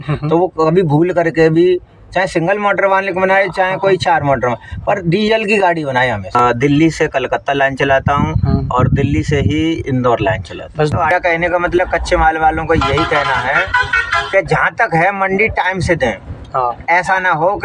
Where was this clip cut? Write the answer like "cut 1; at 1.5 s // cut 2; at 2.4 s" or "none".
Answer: cut 1; at 6.4 s // cut 2; at 10.9 s

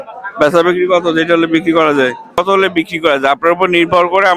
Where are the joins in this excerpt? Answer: cut 1; at 2.4 s

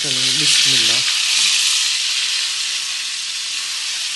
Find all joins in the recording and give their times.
none

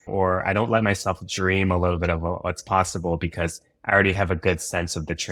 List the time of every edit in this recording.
none

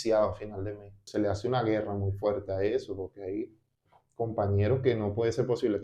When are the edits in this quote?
cut 1; at 1.0 s

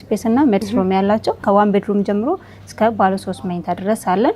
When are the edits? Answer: cut 1; at 1.4 s

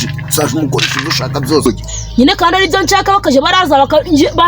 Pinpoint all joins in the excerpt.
cut 1; at 1.7 s

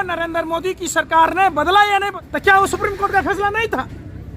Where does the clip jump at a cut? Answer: cut 1; at 2.2 s

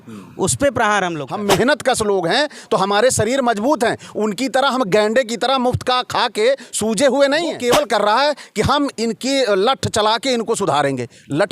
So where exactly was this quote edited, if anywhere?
cut 1; at 1.3 s // cut 2; at 7.6 s

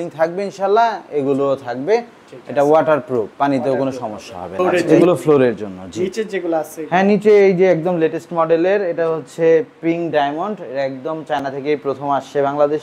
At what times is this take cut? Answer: cut 1; at 4.5 s

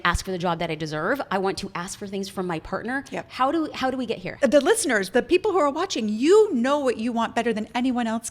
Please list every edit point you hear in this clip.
cut 1; at 4.2 s

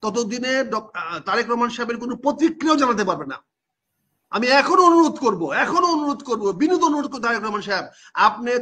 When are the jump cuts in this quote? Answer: none

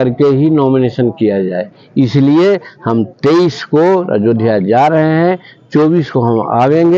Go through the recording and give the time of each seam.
none

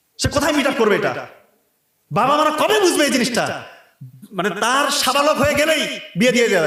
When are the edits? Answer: none

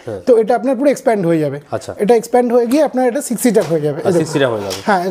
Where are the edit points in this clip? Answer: none

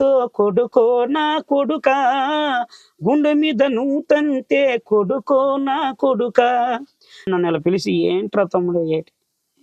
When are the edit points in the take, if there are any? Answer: cut 1; at 7.3 s

